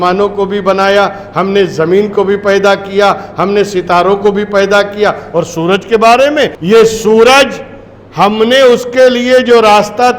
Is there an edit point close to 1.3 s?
no; 1 cut; at 6.6 s

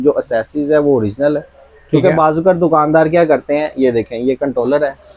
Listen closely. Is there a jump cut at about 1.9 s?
no; 0 cuts

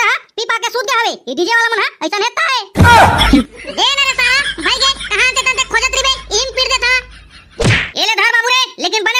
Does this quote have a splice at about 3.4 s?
yes; 1 cut; at 3.4 s

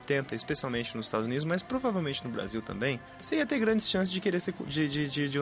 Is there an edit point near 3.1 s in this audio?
yes; 1 cut; at 3.1 s

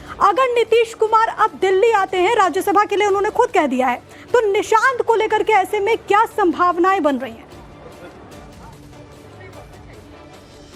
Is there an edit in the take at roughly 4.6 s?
no; 0 cuts

